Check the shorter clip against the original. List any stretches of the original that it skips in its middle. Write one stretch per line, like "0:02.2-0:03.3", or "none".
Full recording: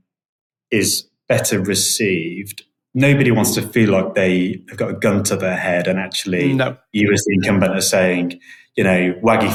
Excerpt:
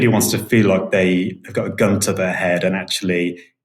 none